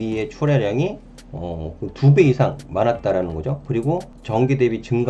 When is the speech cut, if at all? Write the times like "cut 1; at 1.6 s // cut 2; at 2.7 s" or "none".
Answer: cut 1; at 4.1 s